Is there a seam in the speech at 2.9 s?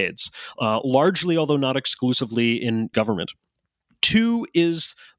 yes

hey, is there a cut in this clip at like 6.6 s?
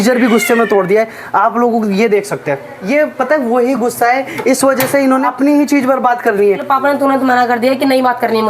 yes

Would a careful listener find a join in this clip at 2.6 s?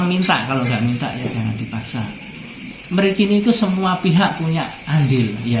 yes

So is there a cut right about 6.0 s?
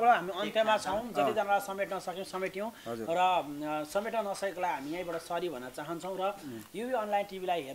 no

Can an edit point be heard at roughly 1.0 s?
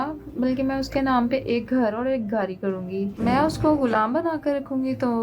no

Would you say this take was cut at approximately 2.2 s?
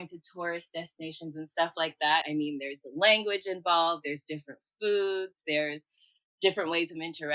yes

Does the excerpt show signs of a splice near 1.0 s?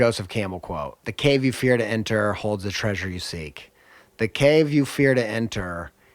yes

